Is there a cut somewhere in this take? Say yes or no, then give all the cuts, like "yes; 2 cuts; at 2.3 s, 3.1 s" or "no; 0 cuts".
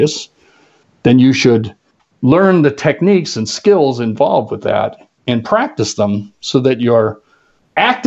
no; 0 cuts